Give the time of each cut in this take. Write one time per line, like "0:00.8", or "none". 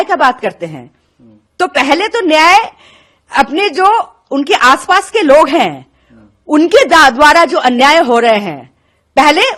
none